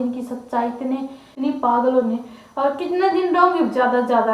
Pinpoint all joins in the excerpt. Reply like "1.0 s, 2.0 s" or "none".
1.3 s